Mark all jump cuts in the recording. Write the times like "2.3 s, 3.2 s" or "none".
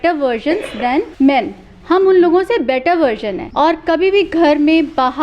1.1 s, 3.4 s